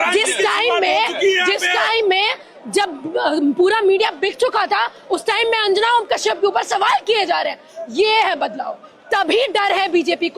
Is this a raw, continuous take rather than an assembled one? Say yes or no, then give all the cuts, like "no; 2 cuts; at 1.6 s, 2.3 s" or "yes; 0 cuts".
yes; 0 cuts